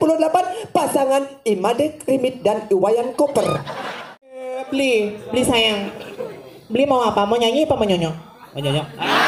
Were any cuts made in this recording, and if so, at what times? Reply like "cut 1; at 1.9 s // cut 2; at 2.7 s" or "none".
cut 1; at 3.7 s